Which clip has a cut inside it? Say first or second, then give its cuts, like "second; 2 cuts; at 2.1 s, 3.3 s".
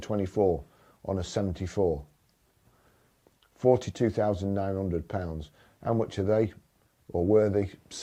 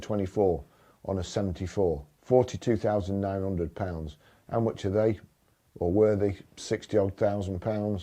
second; 1 cut; at 2.1 s